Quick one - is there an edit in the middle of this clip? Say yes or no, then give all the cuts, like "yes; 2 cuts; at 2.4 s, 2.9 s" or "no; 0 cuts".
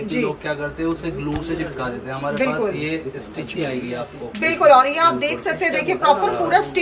no; 0 cuts